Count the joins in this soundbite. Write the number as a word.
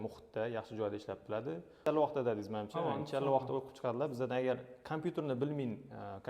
one